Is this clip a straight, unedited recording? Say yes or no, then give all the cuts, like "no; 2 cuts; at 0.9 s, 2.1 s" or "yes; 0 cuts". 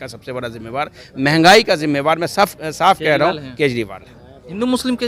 yes; 0 cuts